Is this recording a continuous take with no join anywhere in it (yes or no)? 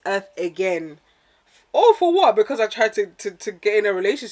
yes